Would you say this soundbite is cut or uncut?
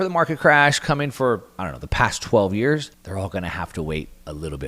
cut